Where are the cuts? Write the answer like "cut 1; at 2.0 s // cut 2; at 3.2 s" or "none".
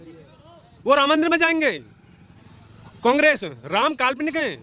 none